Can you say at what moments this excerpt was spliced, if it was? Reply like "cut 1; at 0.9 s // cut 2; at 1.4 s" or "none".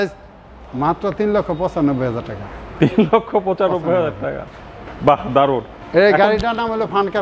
cut 1; at 5.8 s